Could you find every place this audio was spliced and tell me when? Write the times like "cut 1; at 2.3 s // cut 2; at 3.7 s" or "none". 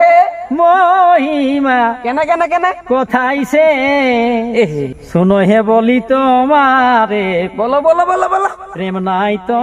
cut 1; at 5.0 s